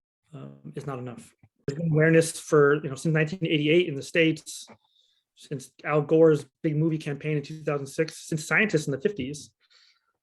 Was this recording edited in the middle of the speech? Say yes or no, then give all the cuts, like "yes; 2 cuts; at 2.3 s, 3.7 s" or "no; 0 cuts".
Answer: yes; 1 cut; at 1.7 s